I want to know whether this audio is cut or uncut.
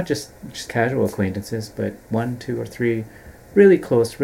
cut